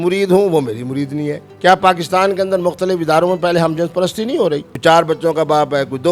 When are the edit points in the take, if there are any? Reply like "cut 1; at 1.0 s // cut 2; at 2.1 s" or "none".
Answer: cut 1; at 1.4 s // cut 2; at 4.7 s